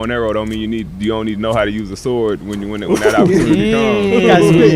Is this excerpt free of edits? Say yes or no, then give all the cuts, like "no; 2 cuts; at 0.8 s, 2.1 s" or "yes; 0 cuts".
yes; 0 cuts